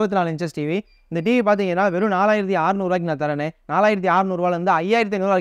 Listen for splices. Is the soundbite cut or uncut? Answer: uncut